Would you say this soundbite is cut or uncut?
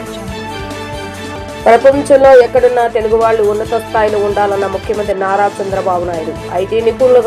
cut